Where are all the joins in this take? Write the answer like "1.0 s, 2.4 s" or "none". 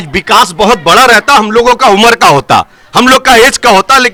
none